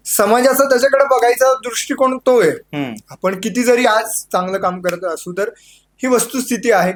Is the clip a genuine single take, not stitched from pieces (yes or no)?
yes